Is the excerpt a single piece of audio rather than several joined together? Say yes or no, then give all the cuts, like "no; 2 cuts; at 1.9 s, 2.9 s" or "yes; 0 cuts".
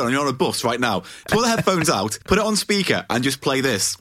no; 2 cuts; at 1.2 s, 2.2 s